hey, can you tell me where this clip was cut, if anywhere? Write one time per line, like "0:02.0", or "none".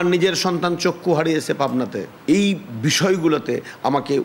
0:02.1